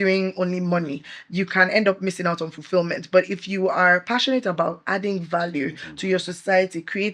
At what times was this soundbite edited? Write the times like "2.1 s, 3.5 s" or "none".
none